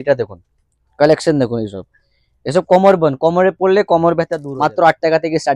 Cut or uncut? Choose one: cut